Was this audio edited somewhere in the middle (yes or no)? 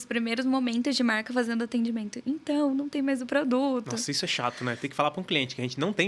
no